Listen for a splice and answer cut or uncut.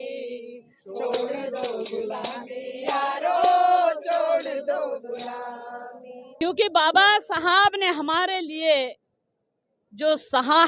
cut